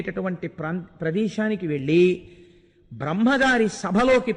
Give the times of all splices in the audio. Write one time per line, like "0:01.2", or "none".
none